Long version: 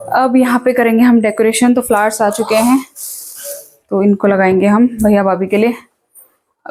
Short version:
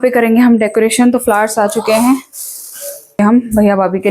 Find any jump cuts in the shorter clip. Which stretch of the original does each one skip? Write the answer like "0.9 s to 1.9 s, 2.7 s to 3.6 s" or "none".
3.8 s to 4.7 s